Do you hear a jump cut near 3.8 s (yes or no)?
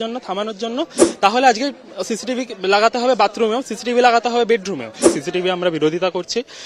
no